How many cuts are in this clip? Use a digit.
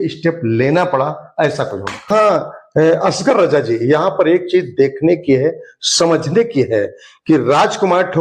1